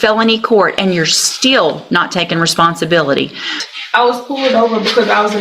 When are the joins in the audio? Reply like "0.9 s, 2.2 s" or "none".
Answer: 3.6 s